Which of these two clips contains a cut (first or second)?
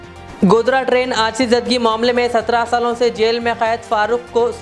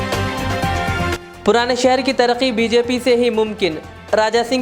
second